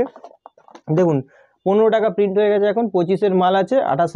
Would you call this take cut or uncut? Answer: uncut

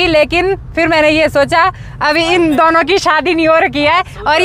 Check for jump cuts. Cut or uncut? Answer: uncut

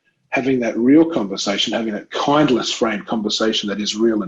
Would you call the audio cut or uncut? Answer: uncut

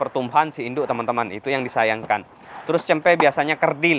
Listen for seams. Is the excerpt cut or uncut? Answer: uncut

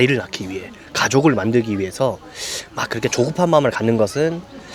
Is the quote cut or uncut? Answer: uncut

